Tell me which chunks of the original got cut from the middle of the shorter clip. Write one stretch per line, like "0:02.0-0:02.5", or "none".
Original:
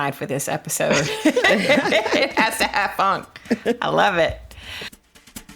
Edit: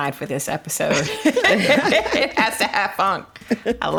none